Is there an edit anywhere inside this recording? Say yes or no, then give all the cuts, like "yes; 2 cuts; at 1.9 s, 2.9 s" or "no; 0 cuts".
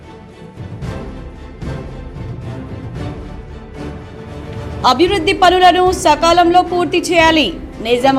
yes; 1 cut; at 4.4 s